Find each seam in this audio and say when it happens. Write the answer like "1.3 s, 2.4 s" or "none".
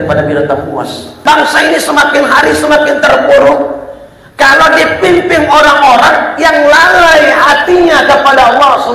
1.2 s